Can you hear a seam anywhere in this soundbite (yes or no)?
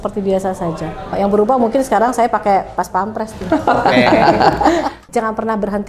yes